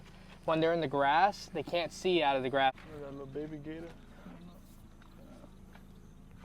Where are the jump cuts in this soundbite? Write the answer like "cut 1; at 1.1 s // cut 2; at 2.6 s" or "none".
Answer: cut 1; at 2.8 s

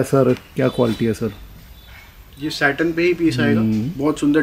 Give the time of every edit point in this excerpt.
none

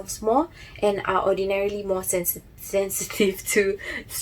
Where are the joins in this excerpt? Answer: none

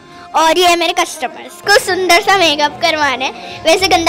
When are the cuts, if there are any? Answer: cut 1; at 1.6 s

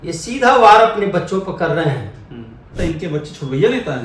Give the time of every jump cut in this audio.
cut 1; at 2.7 s

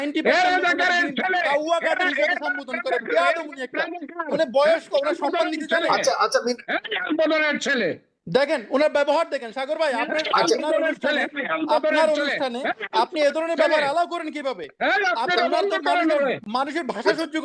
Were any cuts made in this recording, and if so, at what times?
none

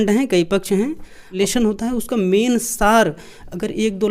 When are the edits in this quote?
cut 1; at 1.3 s

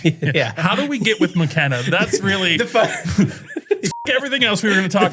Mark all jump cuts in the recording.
none

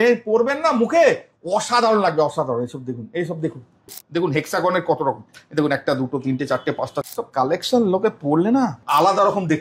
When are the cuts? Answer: cut 1; at 3.9 s // cut 2; at 7.0 s // cut 3; at 8.8 s

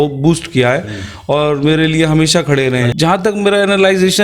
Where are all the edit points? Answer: cut 1; at 2.9 s

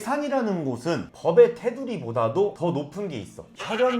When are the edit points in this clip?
cut 1; at 1.1 s

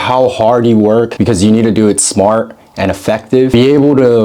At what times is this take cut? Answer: cut 1; at 1.1 s // cut 2; at 3.5 s

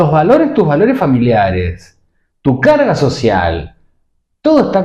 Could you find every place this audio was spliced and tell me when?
none

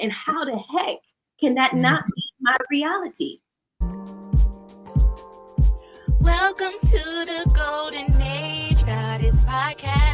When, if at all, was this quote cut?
cut 1; at 3.8 s

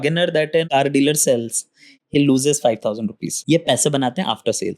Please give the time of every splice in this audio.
cut 1; at 3.3 s

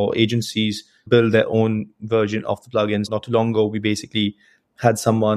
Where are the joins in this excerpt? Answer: cut 1; at 1.0 s // cut 2; at 3.1 s

